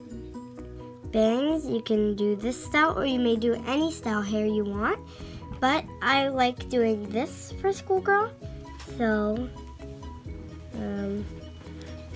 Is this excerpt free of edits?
yes; 0 cuts

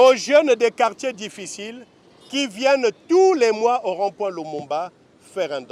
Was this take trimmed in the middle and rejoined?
no; 0 cuts

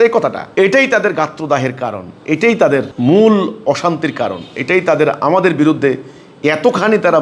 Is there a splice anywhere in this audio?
no; 0 cuts

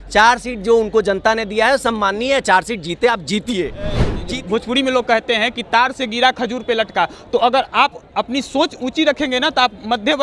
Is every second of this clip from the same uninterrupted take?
no; 1 cut; at 4.1 s

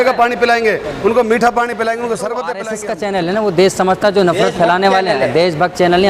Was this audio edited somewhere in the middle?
yes; 1 cut; at 2.6 s

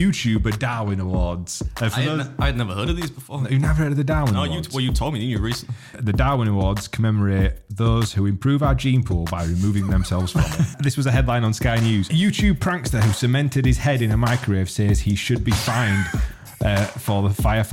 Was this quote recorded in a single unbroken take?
no; 3 cuts; at 6.0 s, 10.7 s, 12.1 s

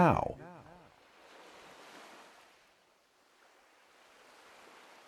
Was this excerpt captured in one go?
no; 1 cut; at 1.0 s

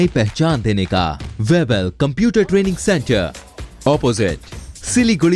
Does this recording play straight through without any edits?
no; 1 cut; at 1.2 s

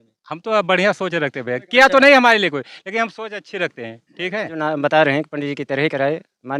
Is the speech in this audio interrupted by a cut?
yes; 1 cut; at 4.6 s

